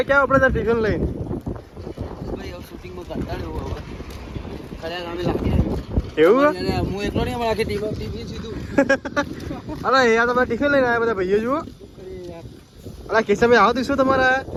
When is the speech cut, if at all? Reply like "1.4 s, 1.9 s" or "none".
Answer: none